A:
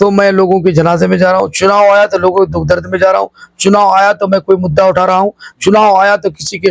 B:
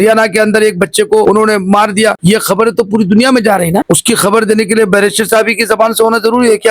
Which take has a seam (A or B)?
B